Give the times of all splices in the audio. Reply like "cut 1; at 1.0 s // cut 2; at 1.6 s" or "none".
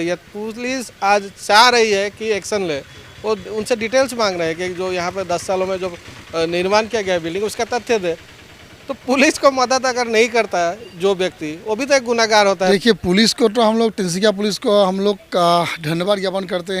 cut 1; at 12.7 s